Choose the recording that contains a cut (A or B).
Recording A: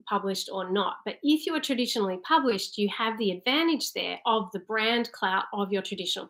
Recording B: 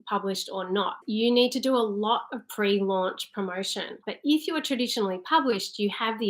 B